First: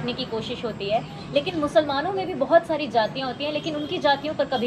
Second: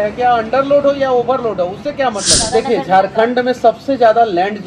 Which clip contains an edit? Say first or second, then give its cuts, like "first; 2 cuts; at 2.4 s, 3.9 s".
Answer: second; 1 cut; at 2.4 s